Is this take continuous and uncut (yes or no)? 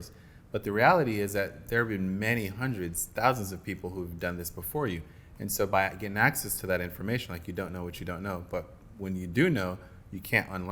yes